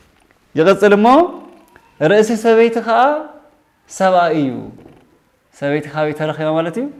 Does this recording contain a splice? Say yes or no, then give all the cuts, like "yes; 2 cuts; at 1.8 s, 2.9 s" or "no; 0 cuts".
no; 0 cuts